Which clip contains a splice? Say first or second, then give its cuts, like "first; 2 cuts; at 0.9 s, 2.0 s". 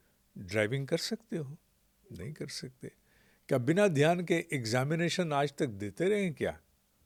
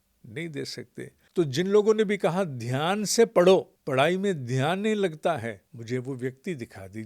second; 3 cuts; at 1.2 s, 3.8 s, 5.7 s